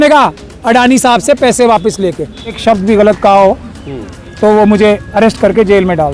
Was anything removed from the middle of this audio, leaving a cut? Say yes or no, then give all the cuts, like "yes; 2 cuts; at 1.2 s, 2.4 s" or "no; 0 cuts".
yes; 1 cut; at 2.6 s